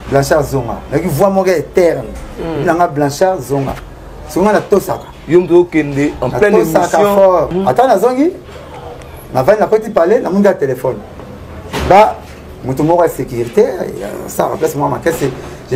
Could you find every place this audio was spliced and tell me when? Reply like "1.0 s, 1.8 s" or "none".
7.5 s

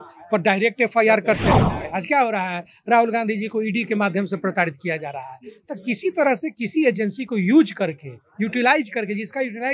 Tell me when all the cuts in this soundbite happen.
1.9 s

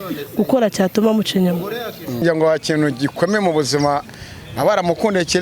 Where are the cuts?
2.2 s

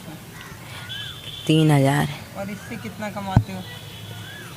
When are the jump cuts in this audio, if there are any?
none

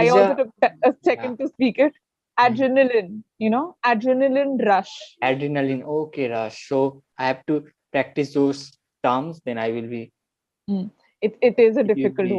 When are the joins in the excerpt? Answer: 7.0 s

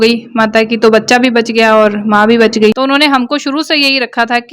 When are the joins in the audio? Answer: 2.8 s

